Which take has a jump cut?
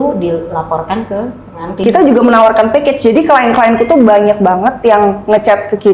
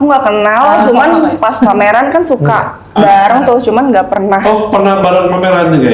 first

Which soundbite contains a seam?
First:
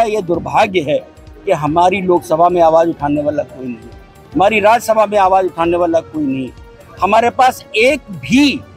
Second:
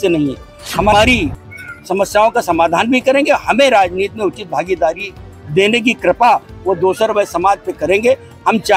second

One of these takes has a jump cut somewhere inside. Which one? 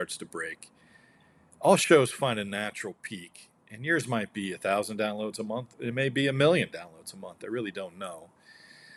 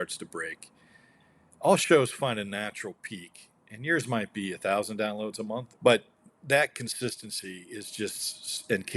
second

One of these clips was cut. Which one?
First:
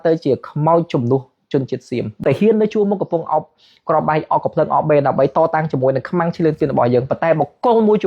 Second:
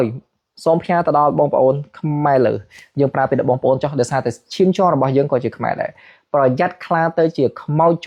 first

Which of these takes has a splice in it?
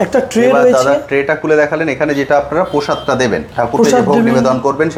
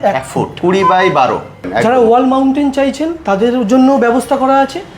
second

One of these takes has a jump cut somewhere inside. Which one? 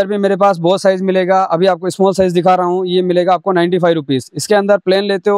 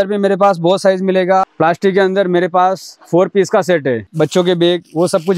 second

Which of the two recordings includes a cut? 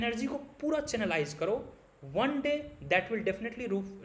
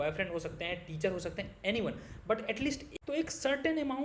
second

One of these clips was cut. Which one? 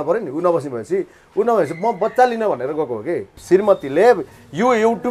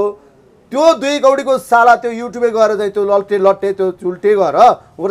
first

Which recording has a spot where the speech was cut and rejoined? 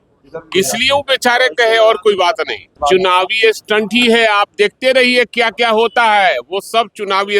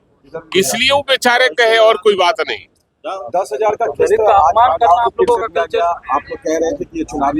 first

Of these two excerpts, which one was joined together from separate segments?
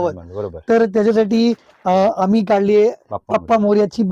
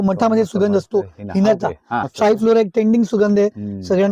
second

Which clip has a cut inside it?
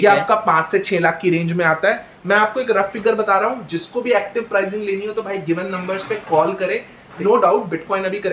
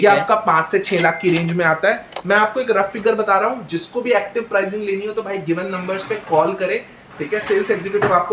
first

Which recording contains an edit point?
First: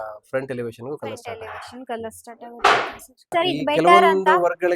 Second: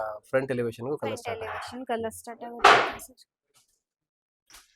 first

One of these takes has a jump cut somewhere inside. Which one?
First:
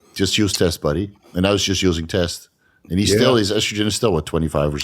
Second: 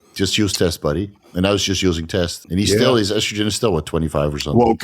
second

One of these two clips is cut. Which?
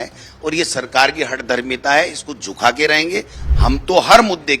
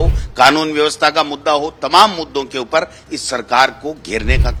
first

